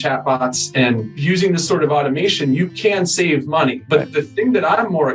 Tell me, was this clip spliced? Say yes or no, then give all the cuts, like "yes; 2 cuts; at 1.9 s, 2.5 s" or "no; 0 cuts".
yes; 2 cuts; at 1.1 s, 3.8 s